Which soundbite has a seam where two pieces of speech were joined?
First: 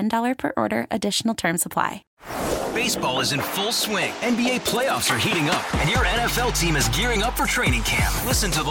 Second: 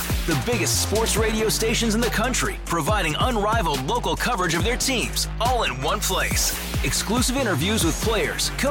first; 1 cut; at 2.0 s

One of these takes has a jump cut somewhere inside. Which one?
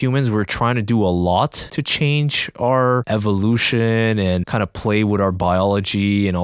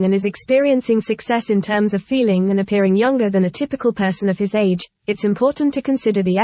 first; 3 cuts; at 1.7 s, 3.0 s, 4.5 s

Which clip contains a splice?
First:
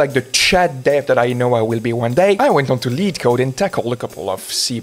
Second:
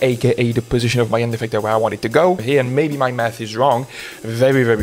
second; 1 cut; at 2.4 s

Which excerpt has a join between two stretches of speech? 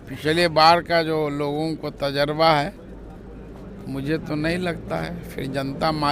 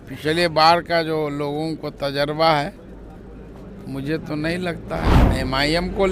second; 1 cut; at 5.2 s

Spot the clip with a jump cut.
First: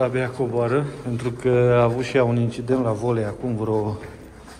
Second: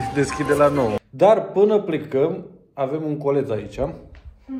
second; 1 cut; at 1.0 s

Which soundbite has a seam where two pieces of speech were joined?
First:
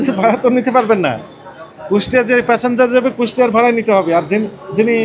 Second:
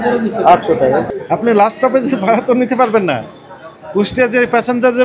second; 1 cut; at 1.0 s

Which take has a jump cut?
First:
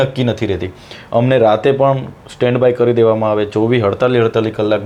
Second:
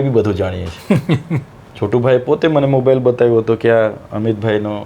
second; 1 cut; at 1.6 s

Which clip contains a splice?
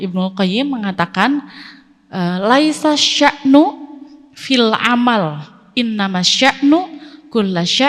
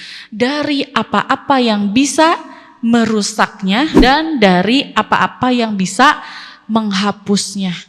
second; 1 cut; at 3.9 s

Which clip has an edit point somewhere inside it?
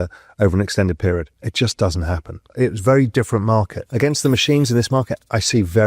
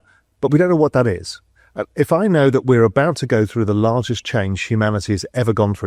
first; 3 cuts; at 1.4 s, 2.5 s, 3.8 s

